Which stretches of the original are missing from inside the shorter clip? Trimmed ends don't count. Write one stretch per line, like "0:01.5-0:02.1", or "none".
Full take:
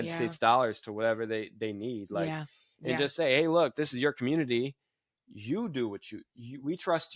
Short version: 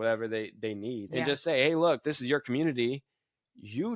0:02.0-0:02.8